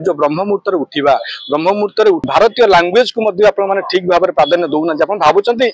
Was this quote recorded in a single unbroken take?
no; 1 cut; at 2.2 s

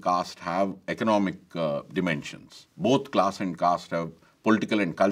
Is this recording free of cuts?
yes; 0 cuts

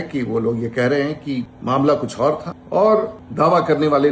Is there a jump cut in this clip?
yes; 3 cuts; at 1.5 s, 2.5 s, 3.2 s

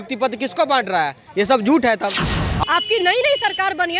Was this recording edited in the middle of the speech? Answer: yes; 1 cut; at 2.4 s

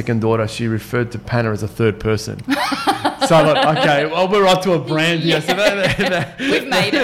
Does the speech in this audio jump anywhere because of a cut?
no; 0 cuts

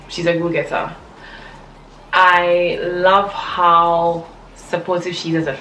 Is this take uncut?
yes; 0 cuts

